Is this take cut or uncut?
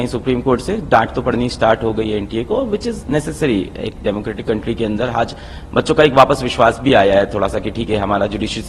uncut